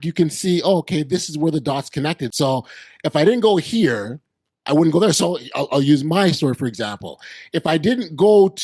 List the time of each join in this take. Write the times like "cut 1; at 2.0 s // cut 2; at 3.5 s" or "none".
none